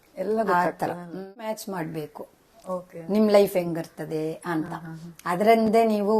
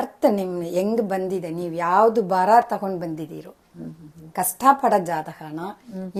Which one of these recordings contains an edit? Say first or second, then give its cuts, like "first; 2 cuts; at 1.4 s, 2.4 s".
first; 1 cut; at 1.6 s